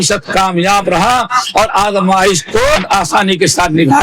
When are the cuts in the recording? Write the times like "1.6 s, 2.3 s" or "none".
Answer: 2.8 s